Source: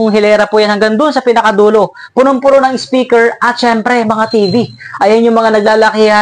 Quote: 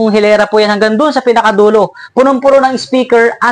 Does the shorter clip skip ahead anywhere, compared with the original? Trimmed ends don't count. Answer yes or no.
no